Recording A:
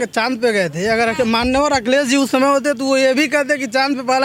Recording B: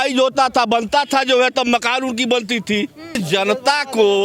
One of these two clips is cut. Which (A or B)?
B